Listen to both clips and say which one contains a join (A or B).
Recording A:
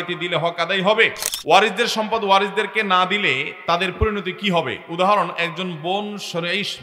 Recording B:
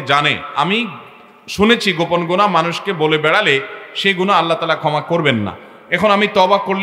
A